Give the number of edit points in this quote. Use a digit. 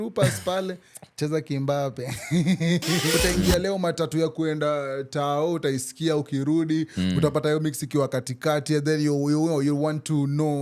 1